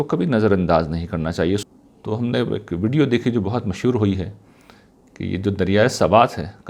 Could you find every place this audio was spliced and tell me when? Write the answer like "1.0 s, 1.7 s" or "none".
1.6 s

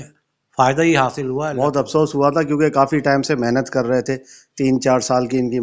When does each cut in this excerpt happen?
1.5 s

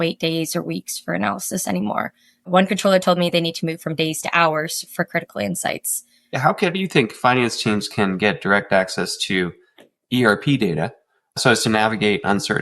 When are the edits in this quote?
6.3 s, 11.4 s

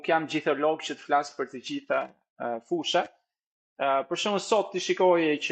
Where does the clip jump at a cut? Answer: none

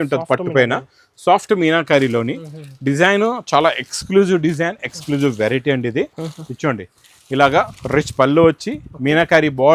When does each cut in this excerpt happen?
none

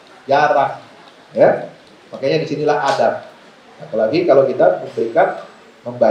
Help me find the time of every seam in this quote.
none

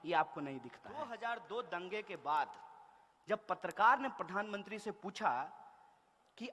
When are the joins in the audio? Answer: 0.9 s

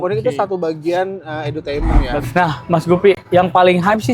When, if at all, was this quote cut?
2.2 s

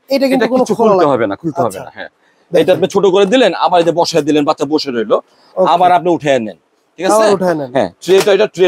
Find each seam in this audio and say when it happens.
none

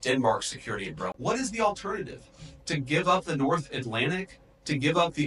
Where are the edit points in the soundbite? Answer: 1.1 s

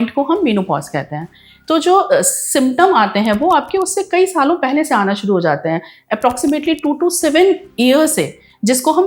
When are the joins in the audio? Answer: none

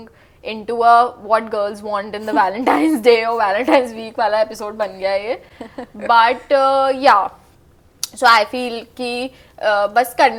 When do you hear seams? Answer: none

